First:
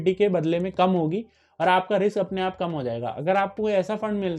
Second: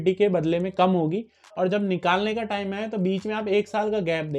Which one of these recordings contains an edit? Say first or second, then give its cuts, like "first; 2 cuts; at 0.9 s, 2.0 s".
second; 1 cut; at 1.4 s